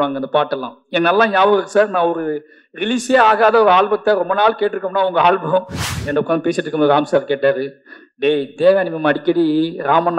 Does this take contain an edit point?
yes; 1 cut; at 6.0 s

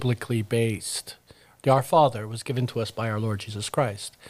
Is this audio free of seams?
yes; 0 cuts

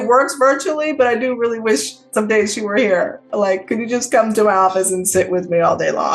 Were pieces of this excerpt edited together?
no; 0 cuts

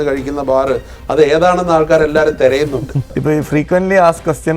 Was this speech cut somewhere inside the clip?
yes; 1 cut; at 3.1 s

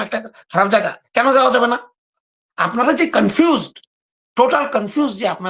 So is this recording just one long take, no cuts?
yes; 0 cuts

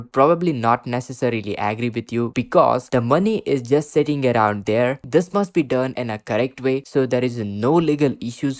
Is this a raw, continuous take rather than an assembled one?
no; 2 cuts; at 2.9 s, 5.0 s

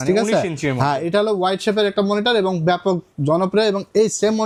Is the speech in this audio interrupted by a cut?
no; 0 cuts

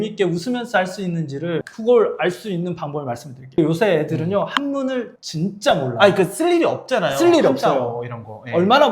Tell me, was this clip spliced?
yes; 1 cut; at 3.6 s

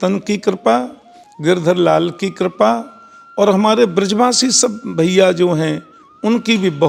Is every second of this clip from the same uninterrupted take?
yes; 0 cuts

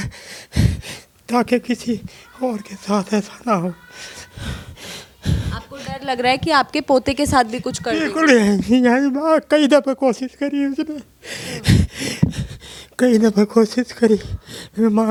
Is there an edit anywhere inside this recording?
no; 0 cuts

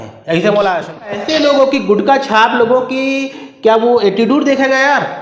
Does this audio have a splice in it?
yes; 1 cut; at 1.1 s

